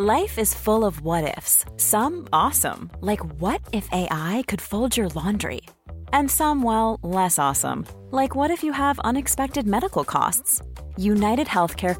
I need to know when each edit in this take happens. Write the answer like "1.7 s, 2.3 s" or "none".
none

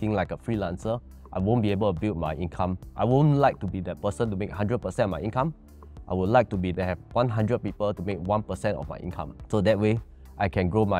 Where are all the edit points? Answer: 2.8 s, 6.9 s, 9.3 s

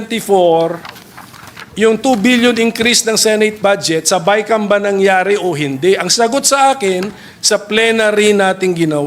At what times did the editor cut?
none

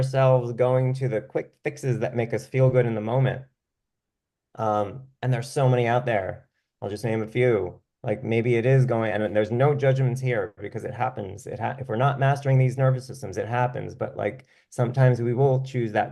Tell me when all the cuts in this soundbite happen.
none

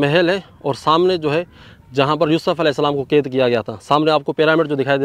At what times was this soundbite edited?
none

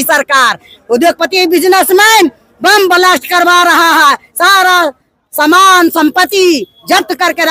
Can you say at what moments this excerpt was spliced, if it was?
none

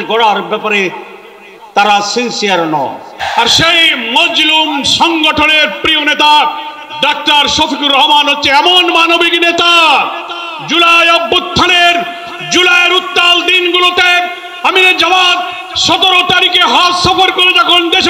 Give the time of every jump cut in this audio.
3.2 s

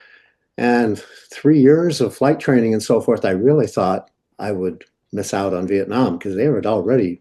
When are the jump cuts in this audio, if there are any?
none

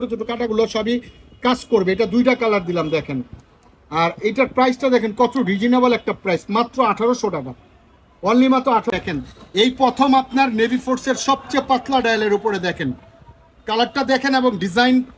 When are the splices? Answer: 8.9 s

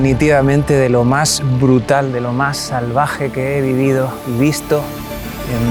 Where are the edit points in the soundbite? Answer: none

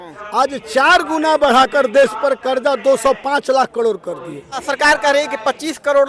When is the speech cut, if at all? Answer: 4.6 s

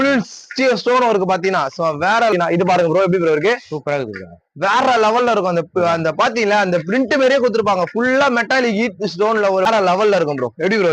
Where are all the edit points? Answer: 2.3 s, 9.7 s

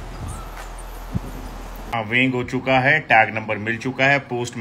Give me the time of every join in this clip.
1.9 s

